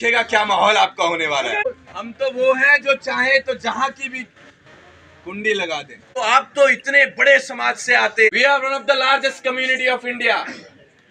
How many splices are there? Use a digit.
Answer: 3